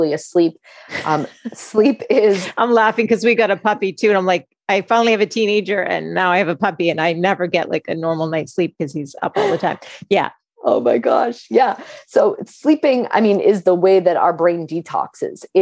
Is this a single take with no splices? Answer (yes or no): yes